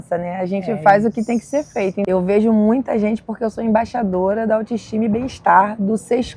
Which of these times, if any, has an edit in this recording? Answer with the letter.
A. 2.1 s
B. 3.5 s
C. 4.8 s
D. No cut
A